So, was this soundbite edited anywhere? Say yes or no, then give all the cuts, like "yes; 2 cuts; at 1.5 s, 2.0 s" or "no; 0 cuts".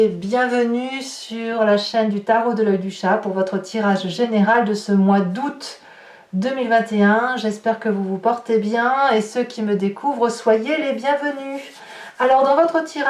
no; 0 cuts